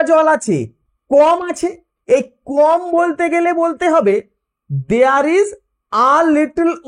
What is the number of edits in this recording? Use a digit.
1